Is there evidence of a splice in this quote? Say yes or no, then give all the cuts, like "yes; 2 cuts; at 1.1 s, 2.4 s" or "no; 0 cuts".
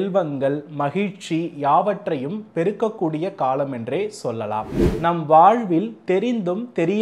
yes; 1 cut; at 4.8 s